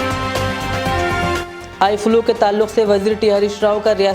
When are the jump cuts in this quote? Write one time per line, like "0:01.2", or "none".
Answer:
0:01.5